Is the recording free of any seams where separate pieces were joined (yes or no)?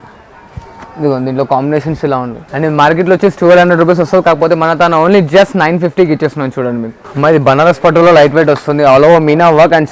yes